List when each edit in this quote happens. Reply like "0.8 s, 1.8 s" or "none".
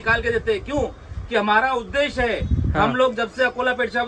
none